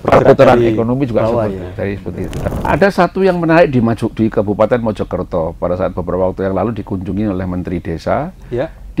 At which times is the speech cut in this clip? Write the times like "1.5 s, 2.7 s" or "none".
2.4 s